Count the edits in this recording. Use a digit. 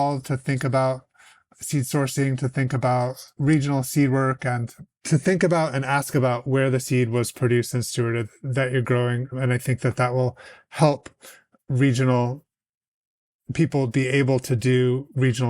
2